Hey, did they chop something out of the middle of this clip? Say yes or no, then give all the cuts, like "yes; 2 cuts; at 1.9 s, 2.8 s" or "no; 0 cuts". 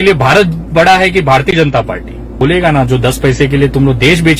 yes; 1 cut; at 2.3 s